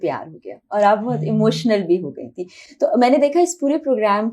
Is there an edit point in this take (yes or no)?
no